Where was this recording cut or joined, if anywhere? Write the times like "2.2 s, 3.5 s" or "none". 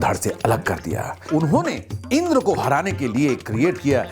1.2 s